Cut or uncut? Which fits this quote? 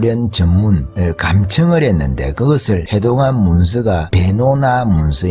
cut